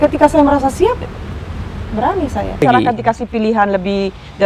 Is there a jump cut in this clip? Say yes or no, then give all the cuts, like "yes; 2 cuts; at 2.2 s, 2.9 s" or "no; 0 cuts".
yes; 1 cut; at 2.6 s